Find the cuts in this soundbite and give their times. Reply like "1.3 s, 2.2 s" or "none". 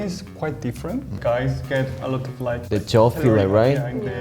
1.1 s, 2.6 s